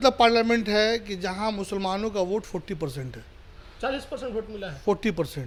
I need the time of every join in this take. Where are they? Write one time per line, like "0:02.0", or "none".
none